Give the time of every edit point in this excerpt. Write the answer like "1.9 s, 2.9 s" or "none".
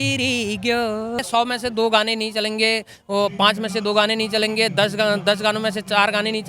1.2 s